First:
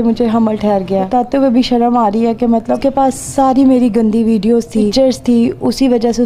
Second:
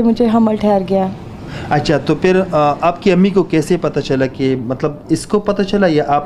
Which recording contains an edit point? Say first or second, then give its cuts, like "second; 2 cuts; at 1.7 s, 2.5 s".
first; 3 cuts; at 1.1 s, 3.0 s, 4.9 s